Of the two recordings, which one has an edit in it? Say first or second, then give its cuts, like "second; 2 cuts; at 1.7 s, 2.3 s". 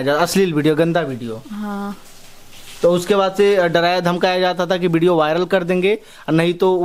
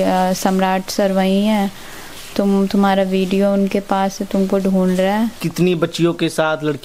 second; 1 cut; at 5.4 s